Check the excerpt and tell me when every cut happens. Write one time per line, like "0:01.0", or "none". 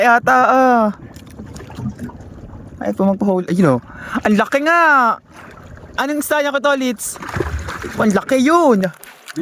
none